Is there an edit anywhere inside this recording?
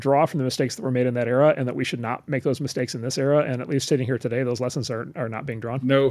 no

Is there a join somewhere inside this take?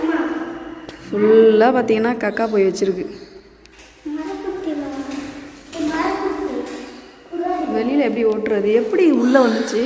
no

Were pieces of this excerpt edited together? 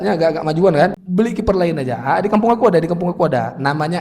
yes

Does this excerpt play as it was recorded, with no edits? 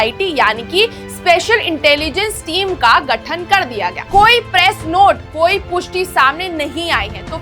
no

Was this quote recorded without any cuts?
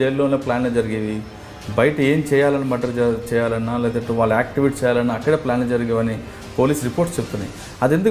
yes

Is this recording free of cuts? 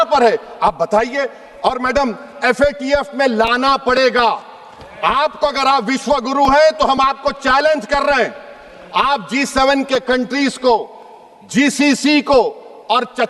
yes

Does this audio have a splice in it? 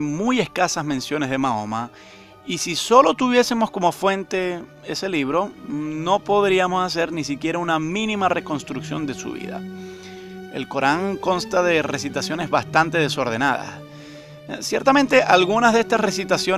yes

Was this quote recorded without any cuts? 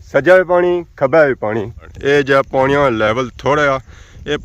no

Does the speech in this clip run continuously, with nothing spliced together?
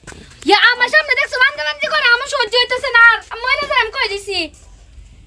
yes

